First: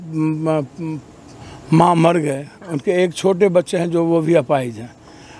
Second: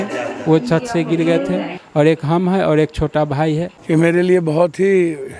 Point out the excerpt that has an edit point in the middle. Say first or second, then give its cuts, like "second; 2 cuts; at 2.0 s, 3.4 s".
second; 1 cut; at 3.7 s